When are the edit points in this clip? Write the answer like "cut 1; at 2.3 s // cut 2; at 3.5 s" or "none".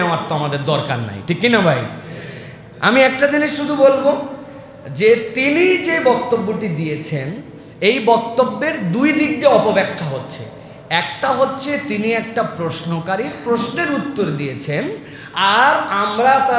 none